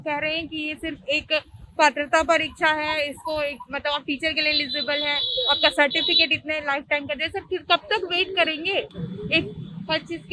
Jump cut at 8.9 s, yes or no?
no